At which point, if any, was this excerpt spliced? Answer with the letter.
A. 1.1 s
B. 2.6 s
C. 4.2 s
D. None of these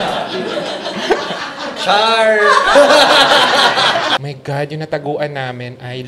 C